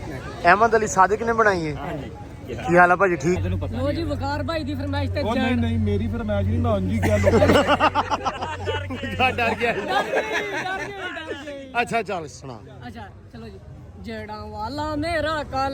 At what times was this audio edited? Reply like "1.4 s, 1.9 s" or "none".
3.4 s